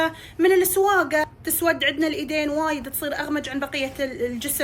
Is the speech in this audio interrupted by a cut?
yes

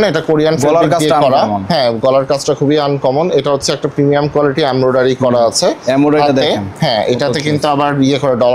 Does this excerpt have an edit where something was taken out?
no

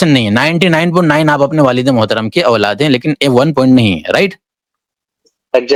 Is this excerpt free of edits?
yes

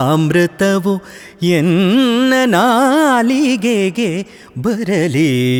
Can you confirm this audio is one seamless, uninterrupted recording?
yes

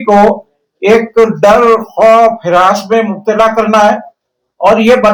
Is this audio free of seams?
yes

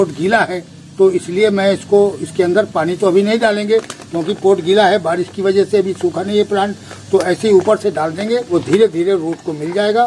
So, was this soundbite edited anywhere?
yes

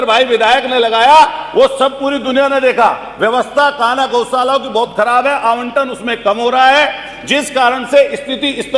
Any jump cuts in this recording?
no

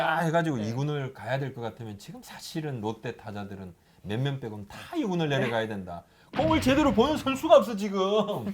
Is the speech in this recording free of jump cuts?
yes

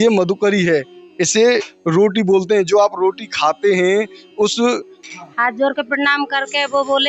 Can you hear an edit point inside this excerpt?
yes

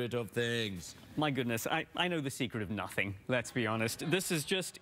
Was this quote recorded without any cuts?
yes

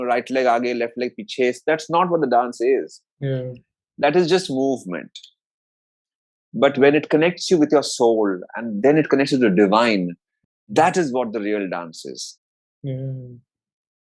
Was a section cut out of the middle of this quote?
no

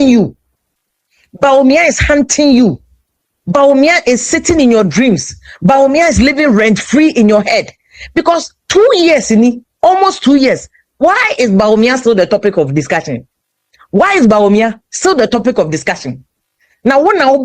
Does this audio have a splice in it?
no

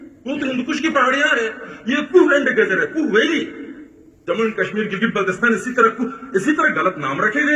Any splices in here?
no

